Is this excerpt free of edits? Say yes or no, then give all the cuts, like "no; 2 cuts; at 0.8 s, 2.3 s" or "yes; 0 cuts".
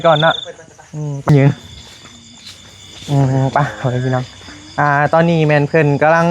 no; 1 cut; at 1.3 s